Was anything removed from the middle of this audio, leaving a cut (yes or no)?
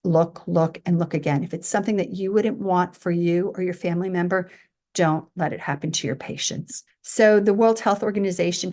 no